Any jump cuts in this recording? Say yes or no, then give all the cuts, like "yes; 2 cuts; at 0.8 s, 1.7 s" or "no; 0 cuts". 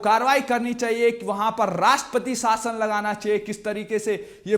no; 0 cuts